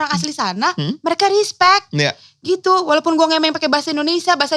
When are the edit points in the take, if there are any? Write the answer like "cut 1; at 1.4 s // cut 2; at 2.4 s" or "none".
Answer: none